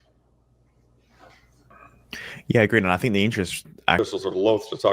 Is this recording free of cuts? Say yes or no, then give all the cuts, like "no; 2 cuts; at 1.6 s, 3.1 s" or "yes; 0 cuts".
no; 1 cut; at 4.0 s